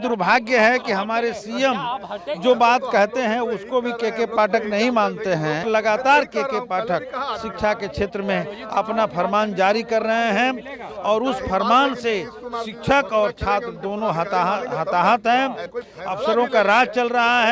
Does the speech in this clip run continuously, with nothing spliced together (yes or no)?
no